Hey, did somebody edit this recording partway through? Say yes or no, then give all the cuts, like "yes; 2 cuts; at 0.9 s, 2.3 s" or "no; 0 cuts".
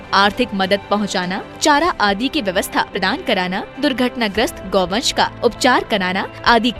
yes; 1 cut; at 3.0 s